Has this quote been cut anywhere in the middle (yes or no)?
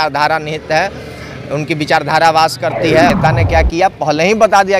yes